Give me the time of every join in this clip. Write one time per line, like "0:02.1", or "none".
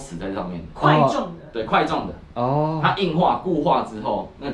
none